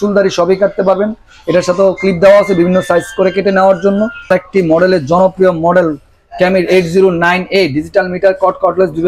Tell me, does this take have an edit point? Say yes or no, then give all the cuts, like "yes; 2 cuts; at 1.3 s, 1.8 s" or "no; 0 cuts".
yes; 1 cut; at 4.3 s